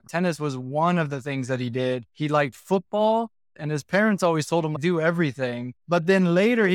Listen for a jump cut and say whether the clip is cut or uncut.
cut